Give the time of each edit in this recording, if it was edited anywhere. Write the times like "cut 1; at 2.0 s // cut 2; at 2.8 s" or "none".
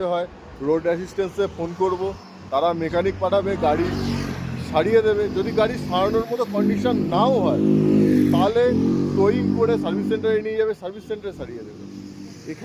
none